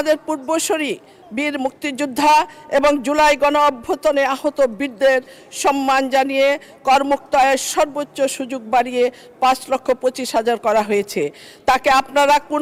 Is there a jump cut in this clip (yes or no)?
no